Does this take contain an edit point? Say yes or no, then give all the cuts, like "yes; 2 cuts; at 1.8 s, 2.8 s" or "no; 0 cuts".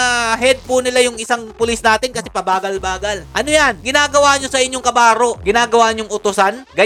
no; 0 cuts